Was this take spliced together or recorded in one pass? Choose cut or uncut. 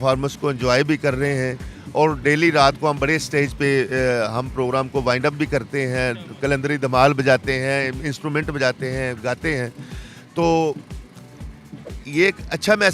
uncut